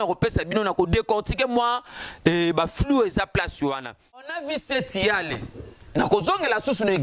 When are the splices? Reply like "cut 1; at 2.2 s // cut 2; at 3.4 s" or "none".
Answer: cut 1; at 4.3 s